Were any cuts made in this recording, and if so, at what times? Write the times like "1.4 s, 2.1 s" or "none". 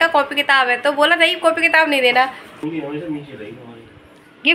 2.5 s

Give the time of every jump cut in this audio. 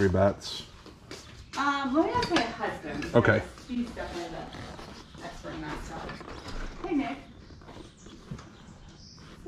none

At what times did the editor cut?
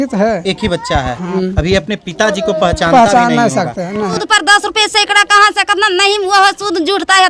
1.3 s, 4.1 s

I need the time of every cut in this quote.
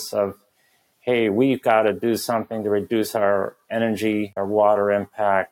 4.3 s

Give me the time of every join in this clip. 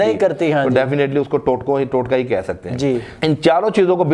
3.1 s

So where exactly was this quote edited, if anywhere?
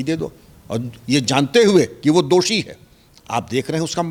none

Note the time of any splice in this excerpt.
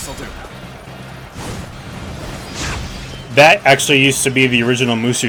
none

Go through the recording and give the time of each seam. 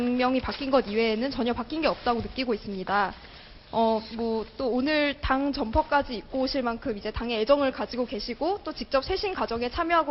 4.1 s

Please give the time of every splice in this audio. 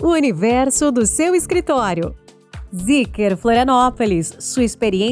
2.6 s

